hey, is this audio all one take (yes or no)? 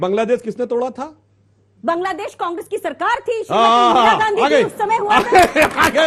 yes